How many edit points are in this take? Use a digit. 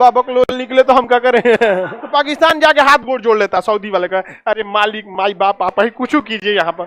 1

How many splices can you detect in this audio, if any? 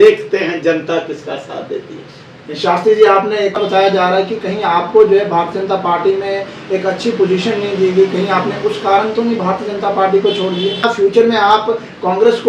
2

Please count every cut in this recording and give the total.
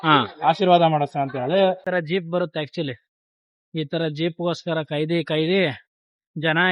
1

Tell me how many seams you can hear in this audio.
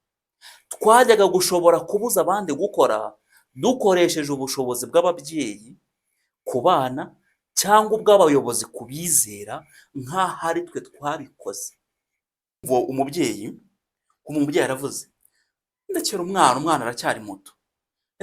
1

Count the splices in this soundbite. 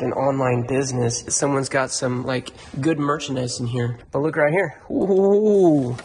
2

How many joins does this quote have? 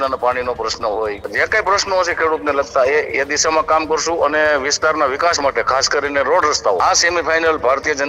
2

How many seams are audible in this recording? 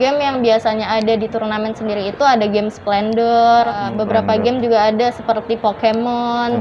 1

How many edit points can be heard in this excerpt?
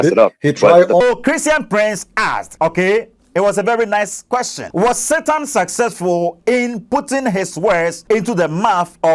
4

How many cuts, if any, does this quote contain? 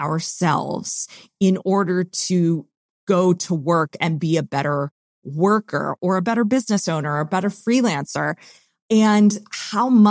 1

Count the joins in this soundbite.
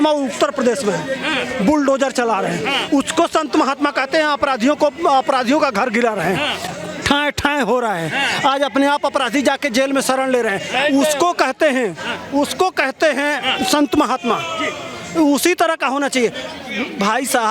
0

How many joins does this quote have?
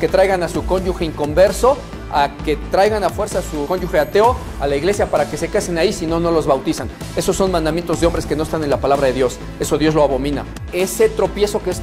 2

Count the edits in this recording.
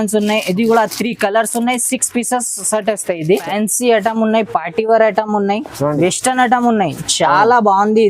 1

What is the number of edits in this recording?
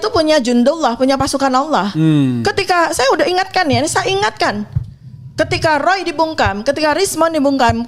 0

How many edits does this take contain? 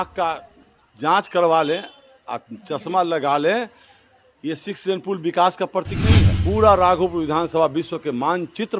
1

